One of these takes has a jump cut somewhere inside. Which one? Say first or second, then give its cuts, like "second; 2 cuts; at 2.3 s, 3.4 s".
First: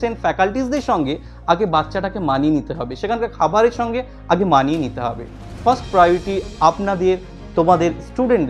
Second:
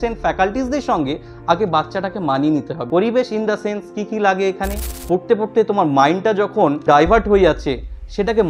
second; 3 cuts; at 2.8 s, 4.9 s, 6.8 s